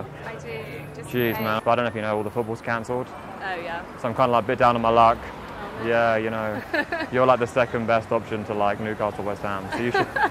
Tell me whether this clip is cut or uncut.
cut